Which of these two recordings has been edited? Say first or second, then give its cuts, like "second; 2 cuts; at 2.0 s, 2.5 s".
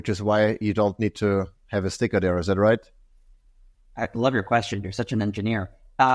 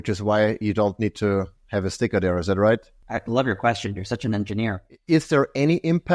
second; 2 cuts; at 3.0 s, 4.9 s